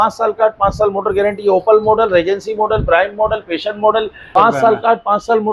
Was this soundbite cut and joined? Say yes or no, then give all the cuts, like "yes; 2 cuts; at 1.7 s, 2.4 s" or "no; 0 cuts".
yes; 1 cut; at 4.3 s